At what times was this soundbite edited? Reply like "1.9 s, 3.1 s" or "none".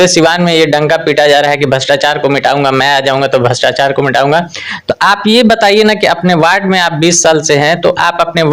none